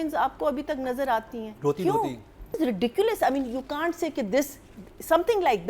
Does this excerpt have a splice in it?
yes; 1 cut; at 2.6 s

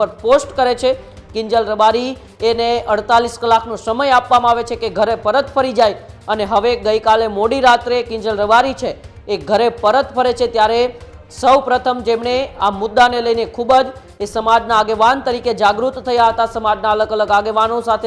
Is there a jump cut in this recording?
no; 0 cuts

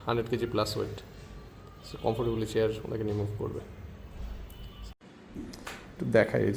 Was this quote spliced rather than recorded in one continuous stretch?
yes; 1 cut; at 4.8 s

